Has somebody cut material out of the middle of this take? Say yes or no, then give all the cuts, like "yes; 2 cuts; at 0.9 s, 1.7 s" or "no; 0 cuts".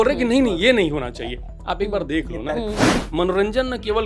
yes; 1 cut; at 2.9 s